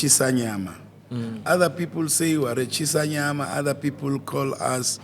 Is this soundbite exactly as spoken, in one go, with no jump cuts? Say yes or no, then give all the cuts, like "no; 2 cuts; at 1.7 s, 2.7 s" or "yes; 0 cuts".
yes; 0 cuts